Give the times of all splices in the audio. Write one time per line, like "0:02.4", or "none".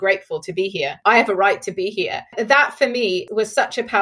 0:00.9
0:02.3
0:03.3